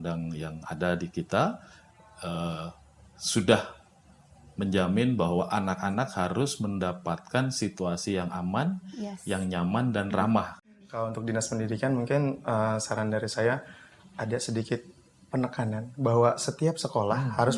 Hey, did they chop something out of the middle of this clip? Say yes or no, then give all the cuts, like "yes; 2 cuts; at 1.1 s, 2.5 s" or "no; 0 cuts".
yes; 1 cut; at 10.6 s